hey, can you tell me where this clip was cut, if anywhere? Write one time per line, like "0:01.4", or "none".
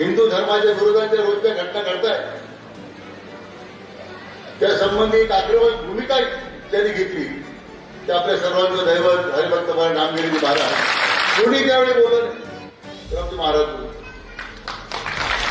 0:11.3